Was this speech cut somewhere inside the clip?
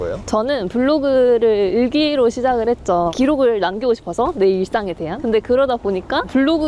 no; 0 cuts

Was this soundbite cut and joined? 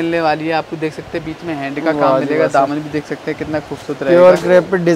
no; 0 cuts

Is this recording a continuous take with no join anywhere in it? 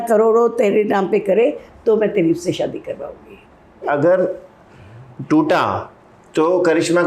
no; 1 cut; at 3.9 s

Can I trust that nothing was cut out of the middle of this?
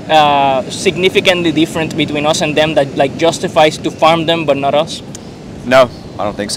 yes; 0 cuts

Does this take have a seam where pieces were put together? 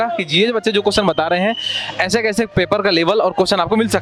no; 0 cuts

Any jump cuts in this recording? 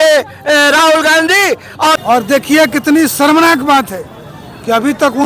yes; 1 cut; at 2.0 s

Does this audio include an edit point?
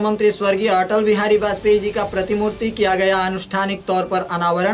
no; 0 cuts

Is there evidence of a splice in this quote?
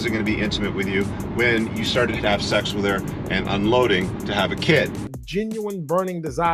yes; 1 cut; at 5.2 s

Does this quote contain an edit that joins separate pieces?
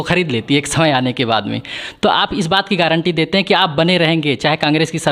no; 0 cuts

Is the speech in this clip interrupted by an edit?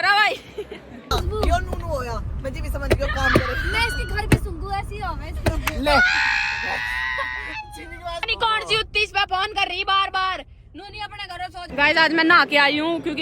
yes; 3 cuts; at 1.1 s, 8.3 s, 11.7 s

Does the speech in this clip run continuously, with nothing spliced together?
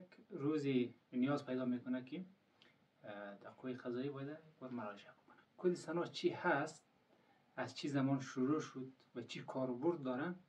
no; 1 cut; at 5.4 s

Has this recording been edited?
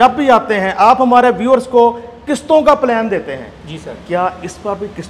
no; 0 cuts

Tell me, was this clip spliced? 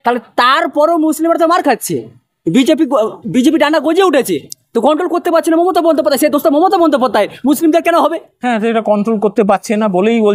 no; 0 cuts

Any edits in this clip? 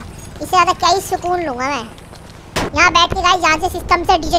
yes; 1 cut; at 2.7 s

